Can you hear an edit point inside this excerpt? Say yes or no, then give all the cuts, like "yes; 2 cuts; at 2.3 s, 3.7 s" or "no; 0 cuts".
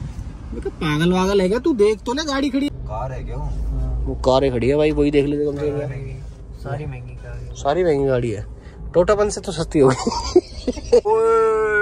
yes; 2 cuts; at 2.7 s, 11.0 s